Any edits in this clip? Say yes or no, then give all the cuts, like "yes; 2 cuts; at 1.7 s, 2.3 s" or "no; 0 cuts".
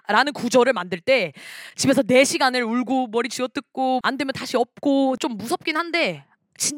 yes; 2 cuts; at 4.0 s, 5.2 s